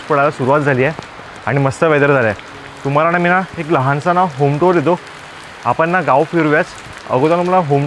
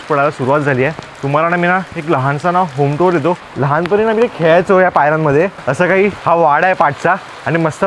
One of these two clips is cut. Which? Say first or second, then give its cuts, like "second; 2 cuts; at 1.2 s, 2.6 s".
second; 3 cuts; at 1.1 s, 3.5 s, 5.7 s